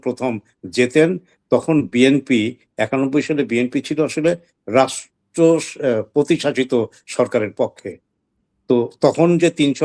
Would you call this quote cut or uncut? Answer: uncut